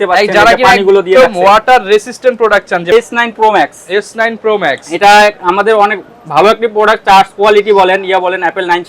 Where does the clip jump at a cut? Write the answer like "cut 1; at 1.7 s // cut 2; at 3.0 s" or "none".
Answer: cut 1; at 2.9 s